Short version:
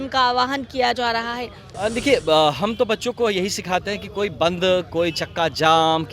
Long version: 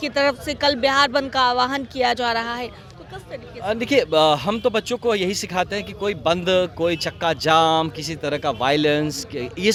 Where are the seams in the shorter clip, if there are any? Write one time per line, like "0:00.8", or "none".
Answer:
0:01.6